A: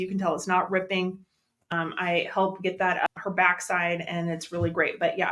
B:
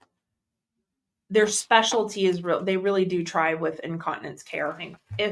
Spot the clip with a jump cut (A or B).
A